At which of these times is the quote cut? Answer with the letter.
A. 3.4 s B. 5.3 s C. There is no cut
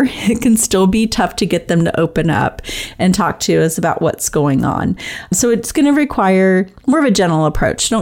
B